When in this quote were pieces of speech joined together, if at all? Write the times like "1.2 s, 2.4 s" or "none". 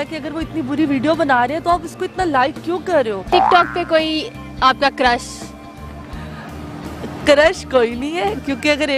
3.3 s